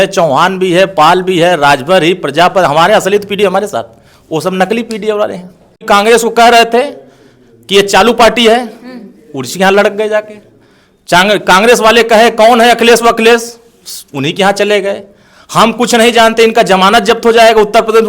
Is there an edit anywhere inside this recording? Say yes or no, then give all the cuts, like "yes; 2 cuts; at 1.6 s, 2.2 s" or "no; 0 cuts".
yes; 1 cut; at 5.8 s